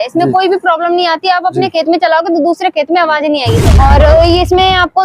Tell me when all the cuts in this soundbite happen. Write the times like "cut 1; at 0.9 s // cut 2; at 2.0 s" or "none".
cut 1; at 3.5 s